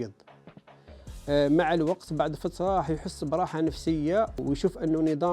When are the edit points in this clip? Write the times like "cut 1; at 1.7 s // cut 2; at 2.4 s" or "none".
cut 1; at 4.4 s